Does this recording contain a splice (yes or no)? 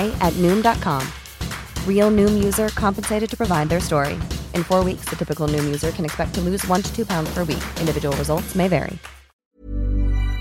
yes